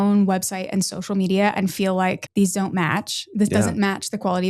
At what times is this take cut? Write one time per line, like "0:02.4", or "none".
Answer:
0:02.2